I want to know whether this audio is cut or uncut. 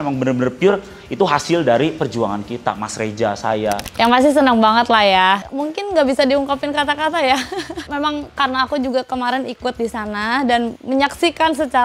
uncut